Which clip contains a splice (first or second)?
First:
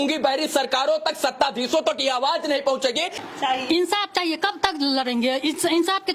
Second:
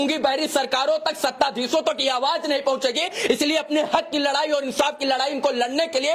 first